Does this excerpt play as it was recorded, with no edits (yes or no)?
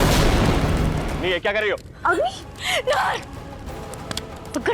no